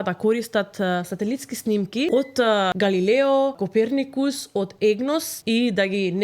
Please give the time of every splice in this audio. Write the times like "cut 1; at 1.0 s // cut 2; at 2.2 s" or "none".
cut 1; at 2.4 s // cut 2; at 3.6 s // cut 3; at 5.3 s